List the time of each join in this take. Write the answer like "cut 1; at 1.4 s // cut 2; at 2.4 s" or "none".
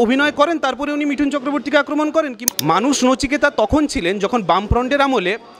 cut 1; at 2.4 s